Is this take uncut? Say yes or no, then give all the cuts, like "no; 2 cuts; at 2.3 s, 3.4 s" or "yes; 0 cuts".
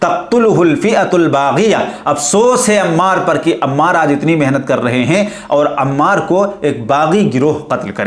yes; 0 cuts